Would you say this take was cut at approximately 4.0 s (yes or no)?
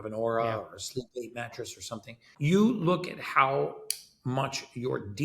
no